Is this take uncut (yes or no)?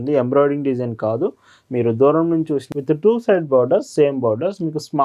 no